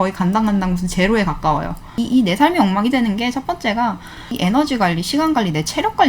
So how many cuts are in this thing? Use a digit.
2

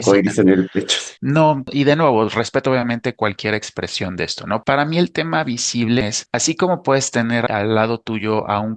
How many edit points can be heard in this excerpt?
4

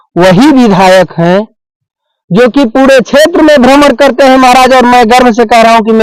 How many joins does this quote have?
0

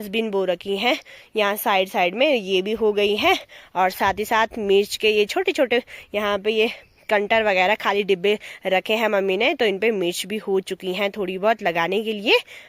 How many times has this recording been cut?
0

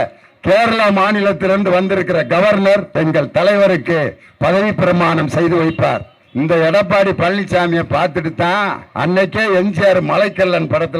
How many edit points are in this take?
3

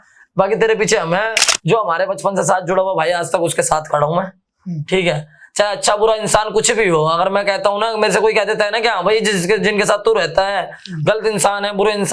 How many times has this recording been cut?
1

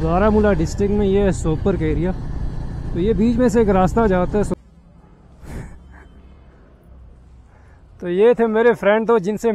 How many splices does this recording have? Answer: 1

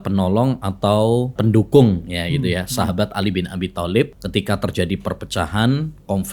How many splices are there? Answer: 2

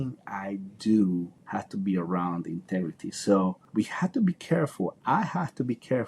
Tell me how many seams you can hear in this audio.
2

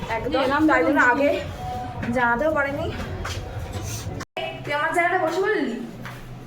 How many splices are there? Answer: 1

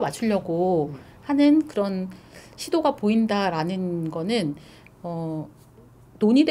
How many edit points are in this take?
0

